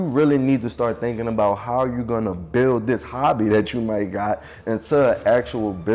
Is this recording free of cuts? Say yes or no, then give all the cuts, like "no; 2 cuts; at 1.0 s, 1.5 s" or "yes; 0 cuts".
yes; 0 cuts